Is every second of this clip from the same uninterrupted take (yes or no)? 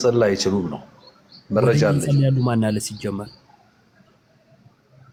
yes